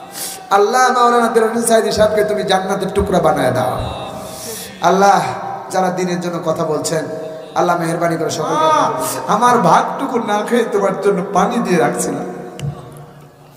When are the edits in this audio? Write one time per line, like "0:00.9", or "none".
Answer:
0:08.6

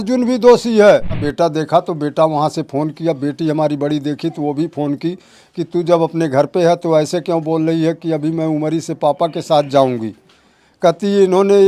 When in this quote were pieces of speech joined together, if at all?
0:01.3

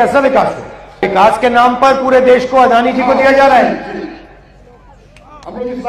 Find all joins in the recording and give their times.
0:01.0

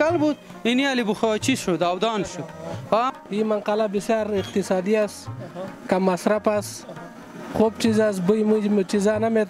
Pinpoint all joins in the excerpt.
0:03.1

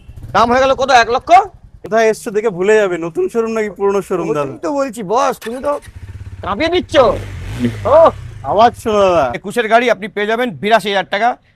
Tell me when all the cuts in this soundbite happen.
0:01.8
0:09.4

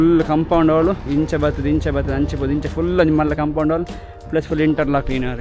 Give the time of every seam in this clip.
none

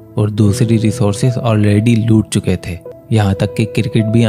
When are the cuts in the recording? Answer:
0:02.8

